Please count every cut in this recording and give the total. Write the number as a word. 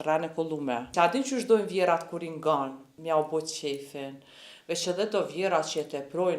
two